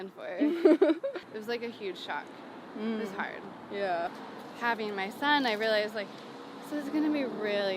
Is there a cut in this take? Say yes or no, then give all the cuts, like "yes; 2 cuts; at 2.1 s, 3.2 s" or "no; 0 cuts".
yes; 2 cuts; at 1.2 s, 4.1 s